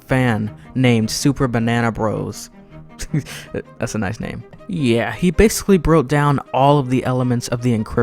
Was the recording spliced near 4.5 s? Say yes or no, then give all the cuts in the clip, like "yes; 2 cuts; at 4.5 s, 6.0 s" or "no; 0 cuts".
yes; 1 cut; at 4.5 s